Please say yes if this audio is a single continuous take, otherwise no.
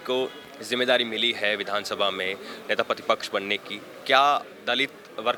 yes